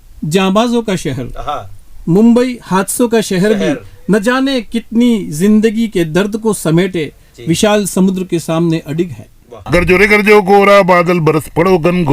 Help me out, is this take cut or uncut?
cut